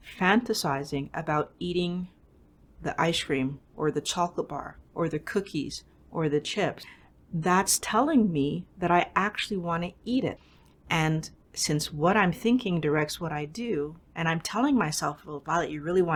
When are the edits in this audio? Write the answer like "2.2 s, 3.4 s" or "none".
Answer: none